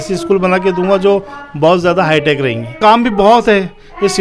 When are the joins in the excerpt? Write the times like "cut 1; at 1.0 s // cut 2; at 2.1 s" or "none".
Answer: cut 1; at 2.8 s